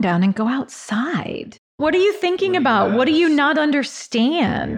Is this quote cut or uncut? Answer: cut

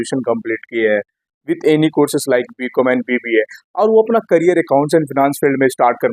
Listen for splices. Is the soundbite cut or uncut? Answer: uncut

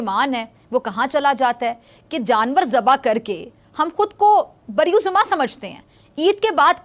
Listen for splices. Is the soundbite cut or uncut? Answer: uncut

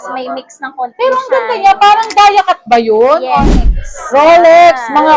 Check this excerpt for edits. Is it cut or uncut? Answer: cut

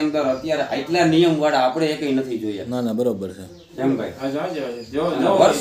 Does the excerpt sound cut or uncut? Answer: uncut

